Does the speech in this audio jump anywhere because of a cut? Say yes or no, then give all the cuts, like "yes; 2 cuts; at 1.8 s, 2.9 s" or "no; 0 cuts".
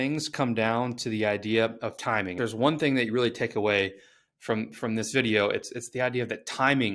yes; 1 cut; at 2.3 s